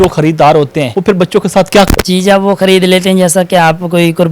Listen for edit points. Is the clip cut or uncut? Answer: cut